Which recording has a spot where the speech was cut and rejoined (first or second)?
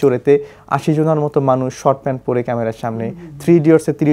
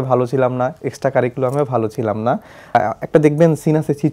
second